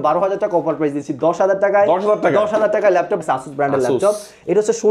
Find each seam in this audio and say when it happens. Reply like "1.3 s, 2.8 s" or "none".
3.2 s